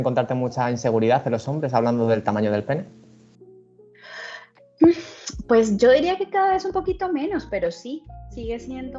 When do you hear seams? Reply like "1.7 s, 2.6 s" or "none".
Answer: none